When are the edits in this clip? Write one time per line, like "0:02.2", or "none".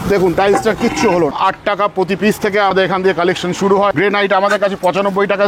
0:01.3
0:02.7
0:03.9